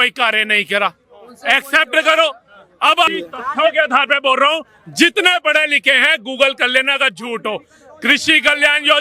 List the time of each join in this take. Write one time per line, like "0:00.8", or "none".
0:03.2